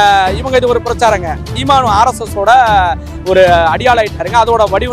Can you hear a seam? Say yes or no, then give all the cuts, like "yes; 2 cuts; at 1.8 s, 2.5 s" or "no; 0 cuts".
yes; 1 cut; at 1.5 s